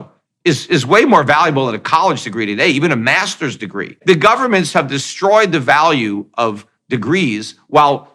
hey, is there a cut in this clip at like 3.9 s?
yes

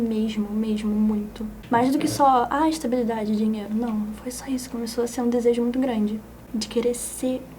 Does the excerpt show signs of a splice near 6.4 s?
yes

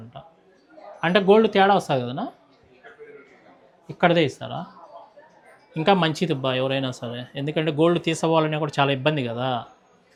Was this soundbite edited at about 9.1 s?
no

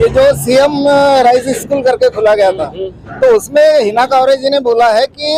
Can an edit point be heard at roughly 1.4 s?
no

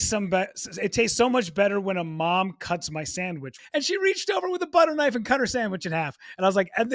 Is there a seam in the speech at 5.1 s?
no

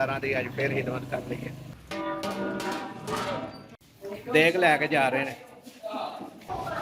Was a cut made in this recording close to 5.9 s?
no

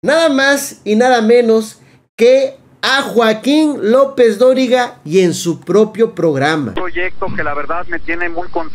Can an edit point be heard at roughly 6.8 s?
yes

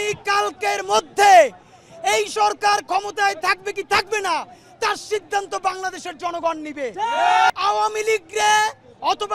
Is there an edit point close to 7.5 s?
yes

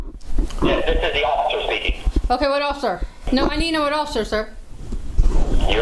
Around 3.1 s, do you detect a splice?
yes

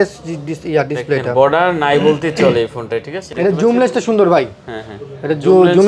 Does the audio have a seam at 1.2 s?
no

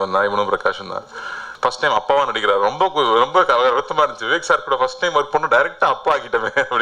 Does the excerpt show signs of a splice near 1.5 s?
yes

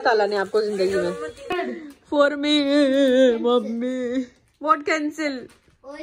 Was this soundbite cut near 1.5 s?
no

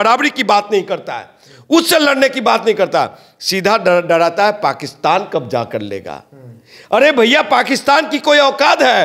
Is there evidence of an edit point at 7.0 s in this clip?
no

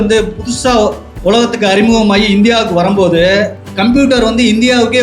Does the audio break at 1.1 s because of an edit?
yes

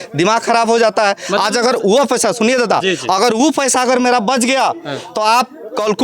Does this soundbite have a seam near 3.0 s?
no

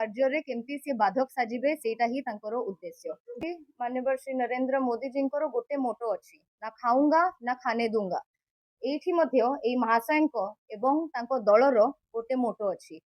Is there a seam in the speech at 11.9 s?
no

